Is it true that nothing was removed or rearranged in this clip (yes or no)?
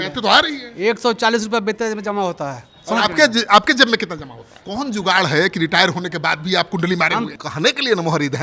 no